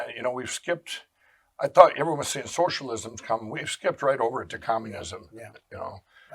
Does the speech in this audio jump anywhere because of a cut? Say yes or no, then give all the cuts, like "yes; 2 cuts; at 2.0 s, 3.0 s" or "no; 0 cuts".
no; 0 cuts